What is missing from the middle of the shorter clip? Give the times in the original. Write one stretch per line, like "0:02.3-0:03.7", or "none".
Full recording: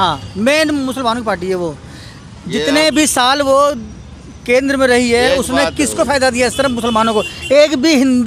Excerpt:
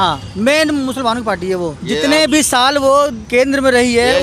0:01.8-0:02.4
0:03.8-0:04.4